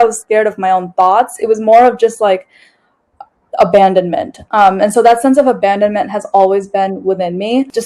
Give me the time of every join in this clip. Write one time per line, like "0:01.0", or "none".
none